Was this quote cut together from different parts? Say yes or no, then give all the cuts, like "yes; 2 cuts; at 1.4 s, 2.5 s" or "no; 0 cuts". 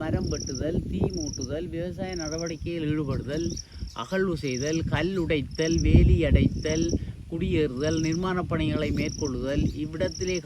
no; 0 cuts